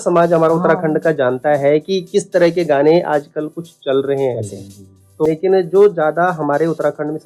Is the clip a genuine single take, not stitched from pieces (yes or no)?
no